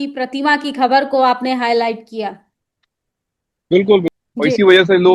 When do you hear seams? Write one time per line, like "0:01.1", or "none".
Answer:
0:04.1